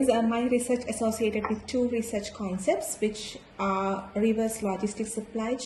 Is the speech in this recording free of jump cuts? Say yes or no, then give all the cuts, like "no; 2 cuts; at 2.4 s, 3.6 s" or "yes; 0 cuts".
yes; 0 cuts